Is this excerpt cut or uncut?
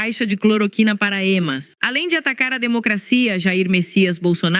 cut